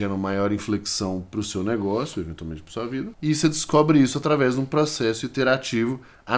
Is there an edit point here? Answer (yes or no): yes